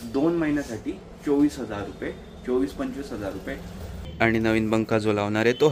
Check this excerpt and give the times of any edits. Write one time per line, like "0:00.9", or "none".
0:04.1